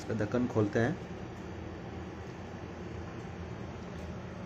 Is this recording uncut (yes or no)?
yes